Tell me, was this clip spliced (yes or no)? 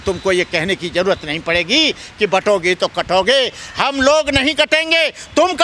no